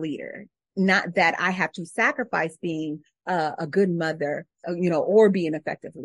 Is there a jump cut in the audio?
yes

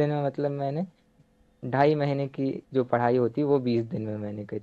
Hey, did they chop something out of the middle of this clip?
yes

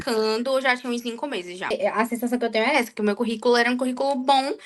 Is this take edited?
yes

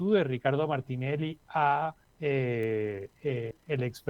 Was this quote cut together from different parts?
yes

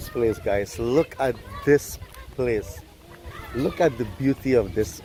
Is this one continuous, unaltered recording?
yes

